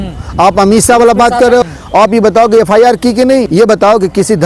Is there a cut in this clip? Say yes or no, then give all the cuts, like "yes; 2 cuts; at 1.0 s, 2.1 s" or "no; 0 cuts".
no; 0 cuts